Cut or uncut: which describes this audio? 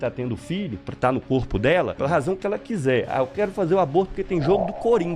cut